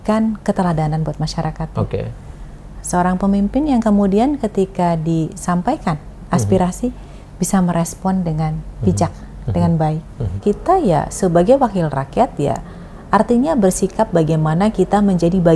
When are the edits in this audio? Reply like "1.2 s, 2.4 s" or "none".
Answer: 10.4 s